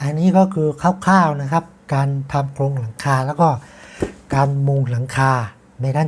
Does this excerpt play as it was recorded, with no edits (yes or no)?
yes